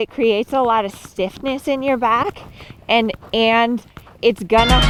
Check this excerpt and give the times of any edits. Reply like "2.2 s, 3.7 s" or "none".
none